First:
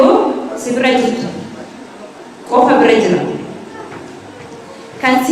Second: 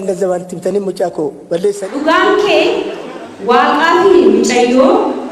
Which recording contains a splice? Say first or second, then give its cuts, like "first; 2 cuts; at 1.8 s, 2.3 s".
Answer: second; 1 cut; at 1.9 s